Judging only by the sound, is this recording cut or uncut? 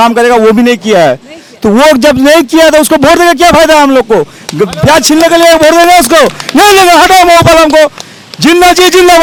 uncut